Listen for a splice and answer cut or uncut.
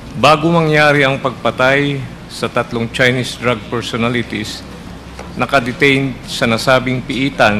uncut